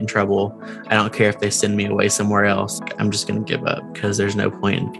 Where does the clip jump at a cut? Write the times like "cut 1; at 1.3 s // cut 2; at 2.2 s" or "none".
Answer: cut 1; at 2.8 s